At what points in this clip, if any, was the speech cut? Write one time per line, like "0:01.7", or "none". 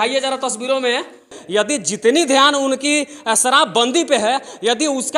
0:01.4